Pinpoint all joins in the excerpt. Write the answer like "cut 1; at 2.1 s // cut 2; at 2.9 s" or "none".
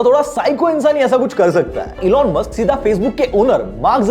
cut 1; at 2.0 s